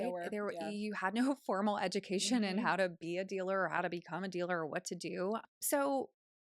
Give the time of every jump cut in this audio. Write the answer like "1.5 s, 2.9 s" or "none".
5.4 s

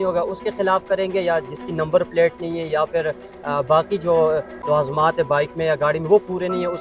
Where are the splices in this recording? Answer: none

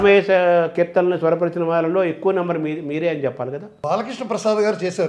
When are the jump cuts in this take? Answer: 3.8 s

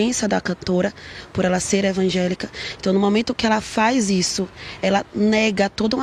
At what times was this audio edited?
none

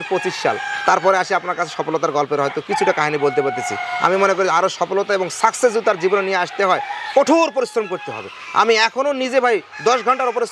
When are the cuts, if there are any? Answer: none

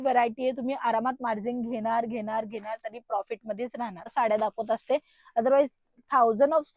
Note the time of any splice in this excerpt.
4.1 s

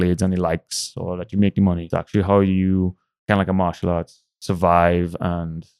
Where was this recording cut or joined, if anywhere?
none

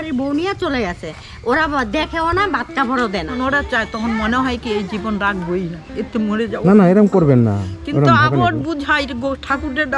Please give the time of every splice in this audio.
3.3 s

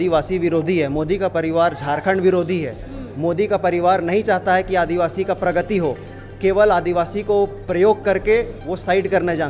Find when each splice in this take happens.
none

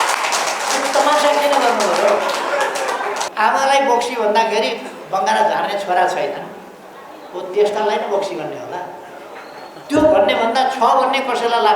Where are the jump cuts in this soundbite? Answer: 3.2 s

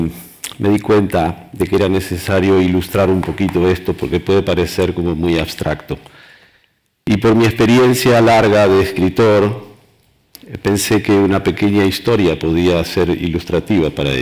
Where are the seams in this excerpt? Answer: 9.4 s

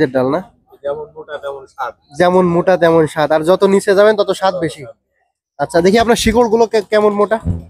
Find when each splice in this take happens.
none

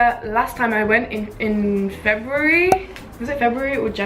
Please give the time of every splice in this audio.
1.5 s

